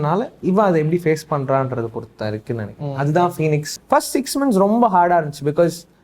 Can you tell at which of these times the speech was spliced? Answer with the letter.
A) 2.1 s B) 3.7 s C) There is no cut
B